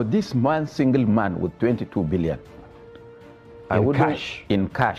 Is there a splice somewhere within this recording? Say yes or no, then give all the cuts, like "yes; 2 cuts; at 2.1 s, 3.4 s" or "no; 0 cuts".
no; 0 cuts